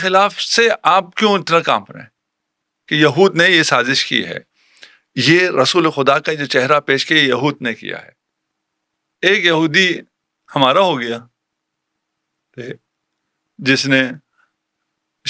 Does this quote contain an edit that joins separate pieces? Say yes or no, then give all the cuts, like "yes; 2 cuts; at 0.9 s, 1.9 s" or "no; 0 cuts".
yes; 1 cut; at 7.8 s